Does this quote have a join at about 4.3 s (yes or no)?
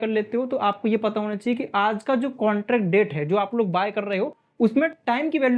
no